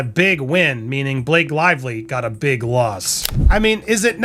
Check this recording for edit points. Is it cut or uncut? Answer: cut